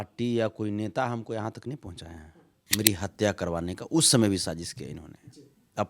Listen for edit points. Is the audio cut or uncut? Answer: cut